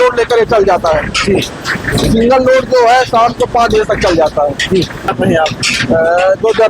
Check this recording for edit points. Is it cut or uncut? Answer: cut